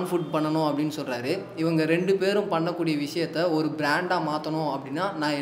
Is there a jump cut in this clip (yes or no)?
no